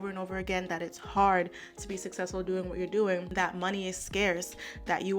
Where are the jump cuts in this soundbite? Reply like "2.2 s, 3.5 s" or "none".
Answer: 3.3 s